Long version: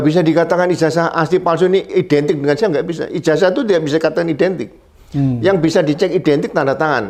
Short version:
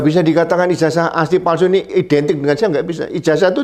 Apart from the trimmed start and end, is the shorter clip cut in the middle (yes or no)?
no